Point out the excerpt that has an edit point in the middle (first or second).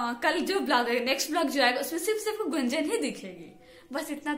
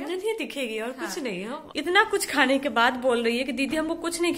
second